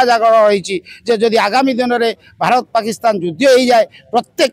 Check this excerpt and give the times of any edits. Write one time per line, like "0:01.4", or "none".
none